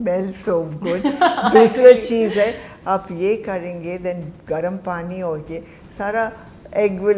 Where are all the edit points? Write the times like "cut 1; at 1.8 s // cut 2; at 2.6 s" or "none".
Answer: none